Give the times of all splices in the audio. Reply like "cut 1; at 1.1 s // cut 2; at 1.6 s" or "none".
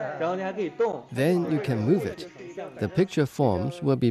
cut 1; at 1.1 s